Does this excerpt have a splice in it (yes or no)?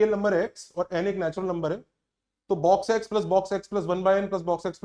no